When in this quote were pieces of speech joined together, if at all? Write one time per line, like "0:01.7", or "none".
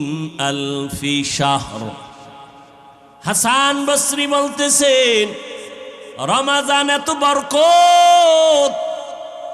0:02.9